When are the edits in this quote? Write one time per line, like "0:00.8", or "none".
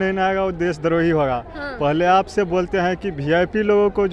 none

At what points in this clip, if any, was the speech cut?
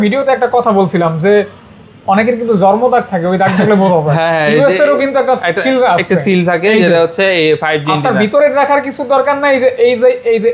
none

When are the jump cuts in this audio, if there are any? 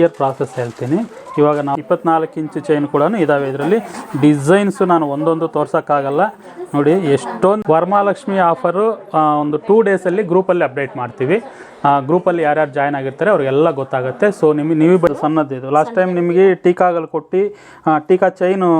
0:01.7
0:07.8
0:15.1

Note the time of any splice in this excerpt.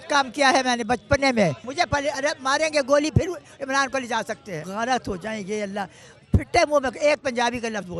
0:01.6
0:04.6

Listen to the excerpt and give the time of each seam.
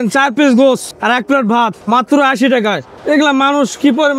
0:00.9
0:01.8
0:02.9

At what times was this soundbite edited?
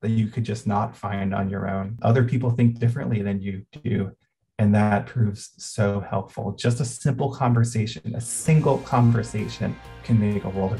0:01.9
0:09.9

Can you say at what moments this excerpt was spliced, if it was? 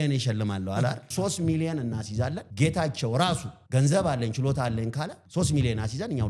0:01.0
0:02.4
0:03.5
0:05.2

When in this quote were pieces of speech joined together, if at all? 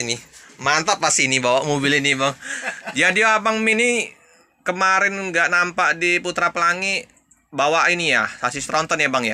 none

